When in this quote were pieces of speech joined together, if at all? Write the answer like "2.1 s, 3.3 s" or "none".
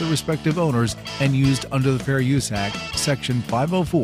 none